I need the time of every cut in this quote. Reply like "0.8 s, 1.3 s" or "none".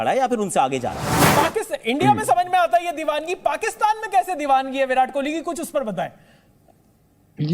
1.2 s